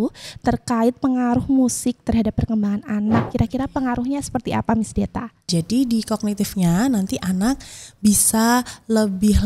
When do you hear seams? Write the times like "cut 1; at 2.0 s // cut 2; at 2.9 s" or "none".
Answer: cut 1; at 3.3 s